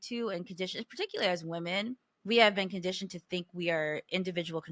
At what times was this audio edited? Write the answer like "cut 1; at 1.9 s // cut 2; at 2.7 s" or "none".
none